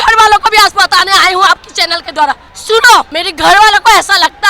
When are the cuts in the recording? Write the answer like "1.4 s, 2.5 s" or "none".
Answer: 2.5 s, 3.2 s